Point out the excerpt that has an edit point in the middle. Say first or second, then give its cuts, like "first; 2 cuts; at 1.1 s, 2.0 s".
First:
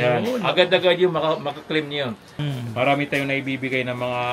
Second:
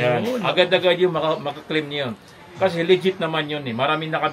first; 1 cut; at 2.4 s